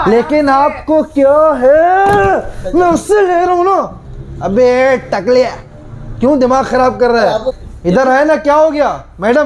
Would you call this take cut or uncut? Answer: cut